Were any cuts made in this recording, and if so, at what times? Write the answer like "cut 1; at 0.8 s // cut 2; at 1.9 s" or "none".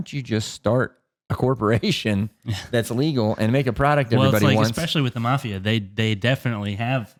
none